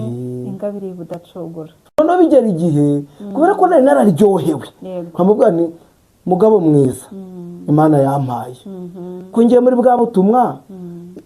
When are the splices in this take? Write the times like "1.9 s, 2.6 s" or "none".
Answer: 2.0 s